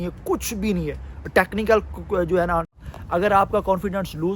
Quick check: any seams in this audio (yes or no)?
yes